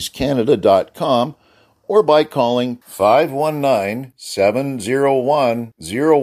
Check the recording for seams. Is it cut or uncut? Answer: uncut